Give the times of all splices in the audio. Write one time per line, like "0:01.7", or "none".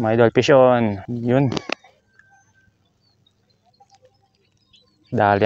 0:01.0